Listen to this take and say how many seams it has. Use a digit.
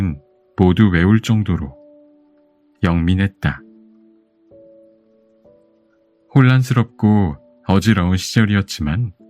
2